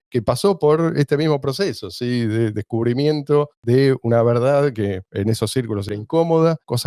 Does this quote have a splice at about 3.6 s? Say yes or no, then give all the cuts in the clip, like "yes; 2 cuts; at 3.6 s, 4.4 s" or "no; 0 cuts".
no; 0 cuts